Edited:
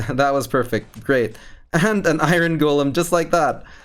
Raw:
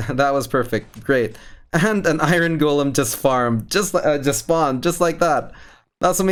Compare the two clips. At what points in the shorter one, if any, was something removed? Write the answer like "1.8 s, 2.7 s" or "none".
2.9 s